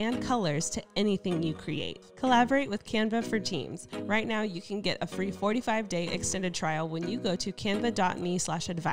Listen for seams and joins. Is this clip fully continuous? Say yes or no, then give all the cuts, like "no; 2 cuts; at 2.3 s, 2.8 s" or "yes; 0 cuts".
no; 1 cut; at 2.0 s